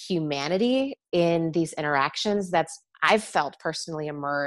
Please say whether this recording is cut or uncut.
cut